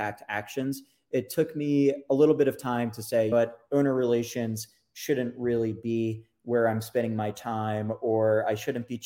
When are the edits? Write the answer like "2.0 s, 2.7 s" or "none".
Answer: 2.0 s, 3.3 s